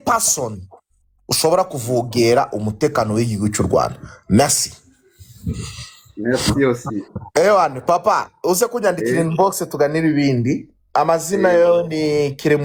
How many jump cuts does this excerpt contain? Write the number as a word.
zero